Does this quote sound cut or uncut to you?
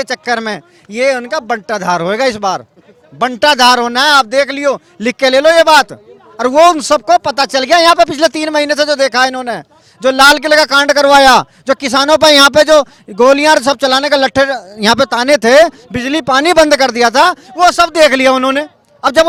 uncut